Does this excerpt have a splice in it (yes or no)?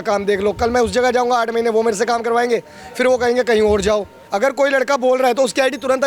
yes